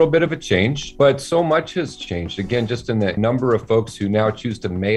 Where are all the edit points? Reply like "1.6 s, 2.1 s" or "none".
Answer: 0.9 s, 3.2 s